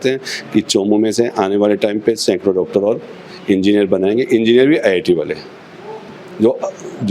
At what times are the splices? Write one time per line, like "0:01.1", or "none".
none